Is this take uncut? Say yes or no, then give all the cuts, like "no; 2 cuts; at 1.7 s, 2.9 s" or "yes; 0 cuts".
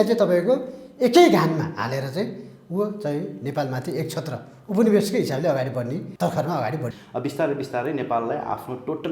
no; 2 cuts; at 6.1 s, 6.9 s